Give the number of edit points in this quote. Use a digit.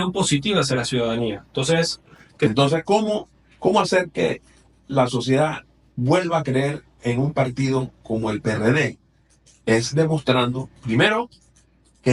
1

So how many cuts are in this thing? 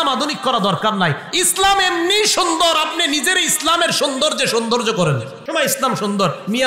1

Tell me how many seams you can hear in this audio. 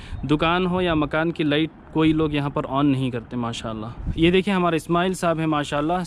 1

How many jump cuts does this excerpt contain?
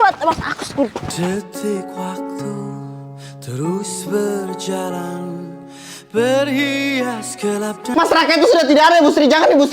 1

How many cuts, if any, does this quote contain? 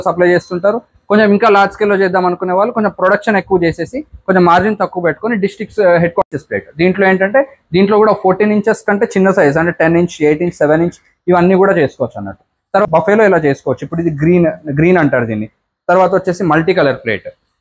2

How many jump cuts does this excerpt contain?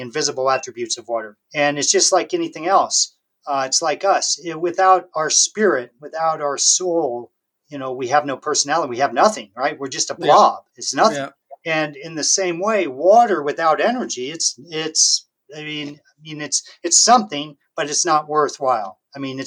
0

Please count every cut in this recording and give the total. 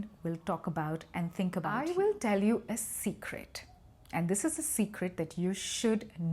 1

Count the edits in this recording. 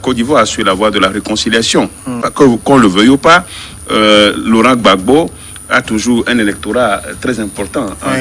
1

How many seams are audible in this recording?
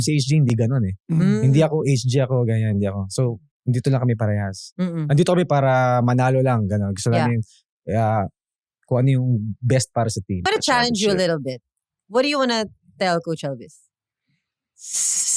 1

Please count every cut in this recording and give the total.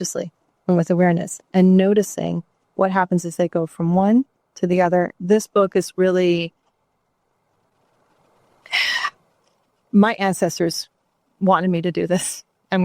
1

